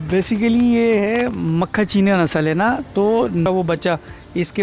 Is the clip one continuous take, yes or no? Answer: no